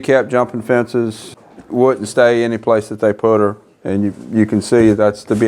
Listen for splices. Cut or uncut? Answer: cut